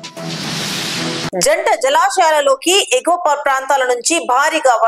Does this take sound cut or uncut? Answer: uncut